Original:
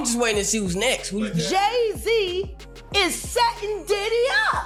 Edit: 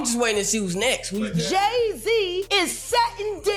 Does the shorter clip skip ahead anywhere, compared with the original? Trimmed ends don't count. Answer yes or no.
yes